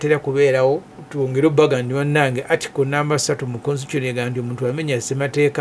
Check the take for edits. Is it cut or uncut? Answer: cut